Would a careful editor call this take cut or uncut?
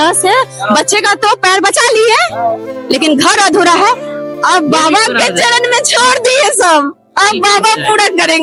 uncut